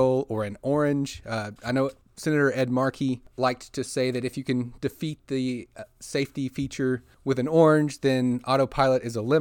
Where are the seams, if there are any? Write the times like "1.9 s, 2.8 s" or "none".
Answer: 2.1 s, 3.3 s, 7.1 s